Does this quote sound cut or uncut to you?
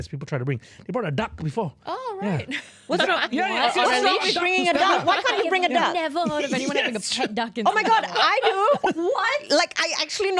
uncut